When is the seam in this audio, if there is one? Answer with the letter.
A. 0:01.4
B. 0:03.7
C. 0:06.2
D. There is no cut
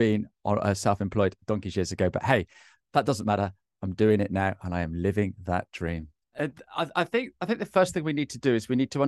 C